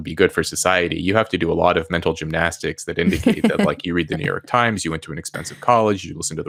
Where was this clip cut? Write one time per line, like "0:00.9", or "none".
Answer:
none